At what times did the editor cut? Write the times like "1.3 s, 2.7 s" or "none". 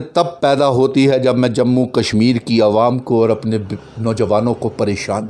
none